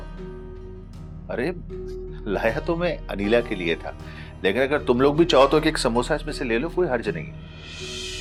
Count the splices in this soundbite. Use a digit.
0